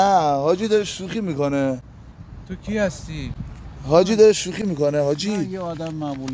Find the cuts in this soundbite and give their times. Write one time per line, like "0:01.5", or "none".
none